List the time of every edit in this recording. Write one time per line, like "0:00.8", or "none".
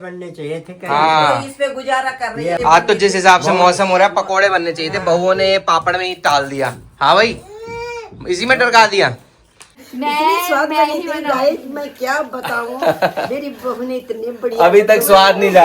0:02.6
0:09.7